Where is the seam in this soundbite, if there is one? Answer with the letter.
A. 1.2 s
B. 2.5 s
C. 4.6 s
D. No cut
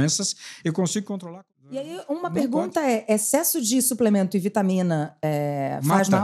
A